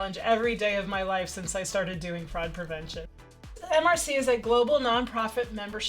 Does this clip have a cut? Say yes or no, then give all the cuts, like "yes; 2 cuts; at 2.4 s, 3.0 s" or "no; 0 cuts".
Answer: yes; 1 cut; at 3.5 s